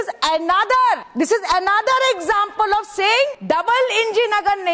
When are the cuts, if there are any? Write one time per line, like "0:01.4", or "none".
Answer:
0:01.1
0:03.4